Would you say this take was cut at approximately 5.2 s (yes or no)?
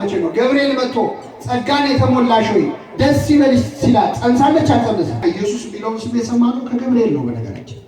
yes